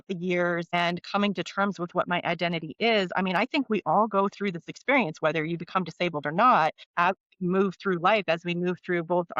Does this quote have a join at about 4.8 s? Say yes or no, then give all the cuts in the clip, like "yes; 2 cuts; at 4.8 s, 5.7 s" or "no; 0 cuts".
no; 2 cuts; at 0.7 s, 6.8 s